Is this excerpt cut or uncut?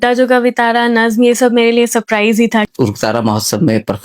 cut